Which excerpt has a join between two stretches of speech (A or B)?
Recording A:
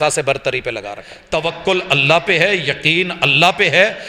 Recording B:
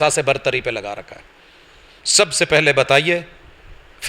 A